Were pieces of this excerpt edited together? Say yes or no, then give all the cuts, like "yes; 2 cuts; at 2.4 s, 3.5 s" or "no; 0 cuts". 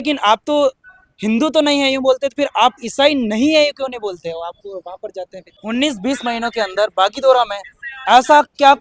yes; 1 cut; at 5.4 s